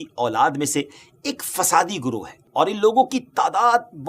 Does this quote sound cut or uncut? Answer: cut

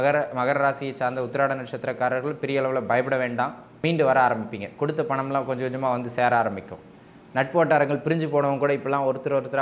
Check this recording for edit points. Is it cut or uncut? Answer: cut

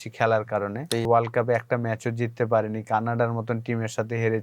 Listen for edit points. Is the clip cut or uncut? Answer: cut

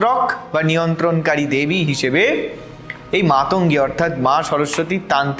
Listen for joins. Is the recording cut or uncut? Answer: uncut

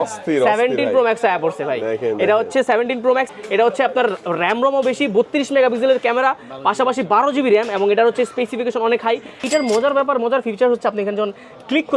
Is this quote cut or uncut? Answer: cut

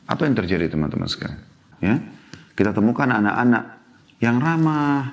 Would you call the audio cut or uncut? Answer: cut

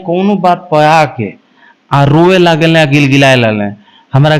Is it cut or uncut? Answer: uncut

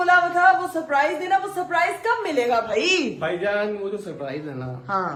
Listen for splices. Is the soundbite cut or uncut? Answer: uncut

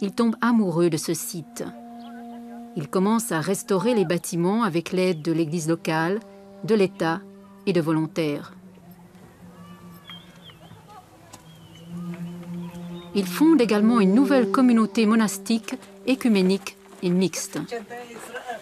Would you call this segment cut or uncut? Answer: uncut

